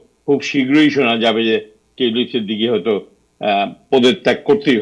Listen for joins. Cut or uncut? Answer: uncut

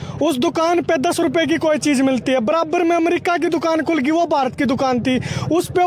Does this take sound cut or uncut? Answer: uncut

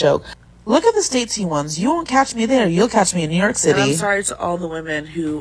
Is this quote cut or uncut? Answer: cut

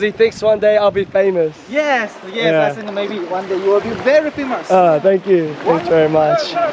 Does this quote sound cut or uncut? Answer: uncut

